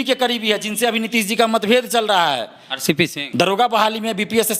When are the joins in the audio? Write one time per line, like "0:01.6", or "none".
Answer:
0:03.2